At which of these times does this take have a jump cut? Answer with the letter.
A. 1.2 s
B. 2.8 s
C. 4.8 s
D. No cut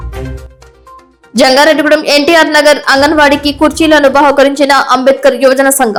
D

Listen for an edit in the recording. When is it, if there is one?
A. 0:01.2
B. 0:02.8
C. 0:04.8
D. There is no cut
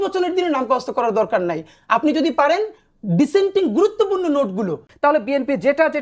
C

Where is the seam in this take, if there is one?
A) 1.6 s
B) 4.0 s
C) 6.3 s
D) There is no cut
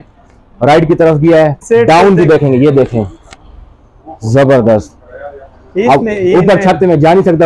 A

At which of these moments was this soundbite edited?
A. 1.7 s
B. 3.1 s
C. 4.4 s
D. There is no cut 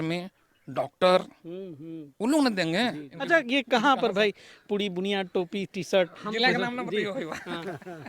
B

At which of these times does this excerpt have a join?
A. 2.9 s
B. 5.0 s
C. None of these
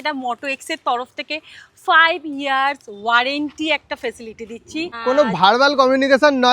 B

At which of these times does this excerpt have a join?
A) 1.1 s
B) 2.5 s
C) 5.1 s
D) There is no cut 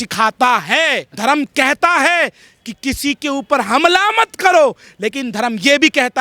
A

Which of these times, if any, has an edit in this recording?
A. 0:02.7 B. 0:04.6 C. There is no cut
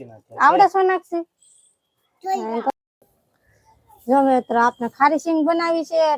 A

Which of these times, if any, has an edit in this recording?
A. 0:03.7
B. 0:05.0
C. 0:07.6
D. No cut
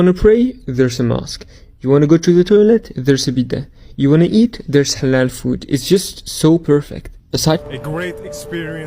C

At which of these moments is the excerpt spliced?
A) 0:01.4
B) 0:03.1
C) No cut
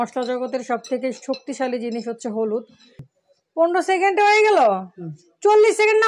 B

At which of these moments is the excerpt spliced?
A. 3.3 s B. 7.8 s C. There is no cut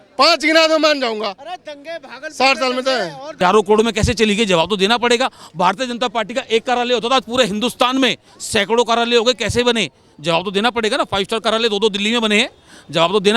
A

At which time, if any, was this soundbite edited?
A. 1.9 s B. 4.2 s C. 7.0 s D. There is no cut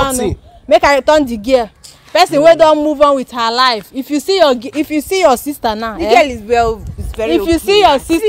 D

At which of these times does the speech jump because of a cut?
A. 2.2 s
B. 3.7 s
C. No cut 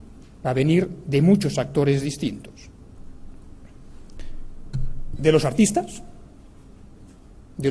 A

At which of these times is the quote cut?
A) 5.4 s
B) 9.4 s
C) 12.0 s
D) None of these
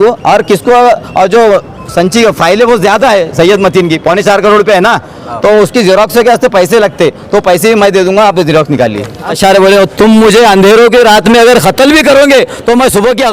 B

